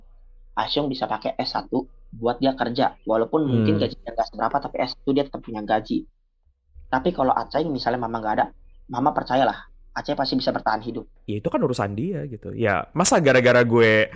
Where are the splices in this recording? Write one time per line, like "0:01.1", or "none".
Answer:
0:11.1